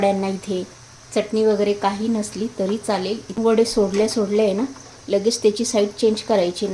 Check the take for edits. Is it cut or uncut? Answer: cut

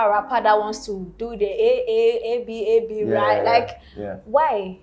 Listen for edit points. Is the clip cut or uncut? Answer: uncut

